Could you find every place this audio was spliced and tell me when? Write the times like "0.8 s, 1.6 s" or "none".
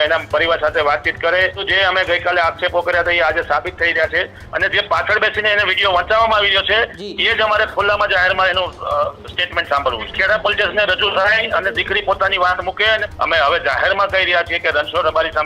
1.6 s, 4.4 s, 10.0 s, 13.0 s